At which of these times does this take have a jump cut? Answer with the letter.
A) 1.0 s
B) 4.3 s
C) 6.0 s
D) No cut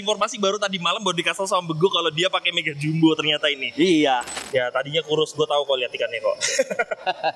B